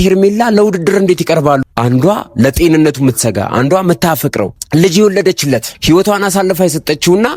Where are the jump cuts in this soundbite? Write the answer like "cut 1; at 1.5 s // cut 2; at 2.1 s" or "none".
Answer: cut 1; at 1.6 s // cut 2; at 4.6 s // cut 3; at 5.7 s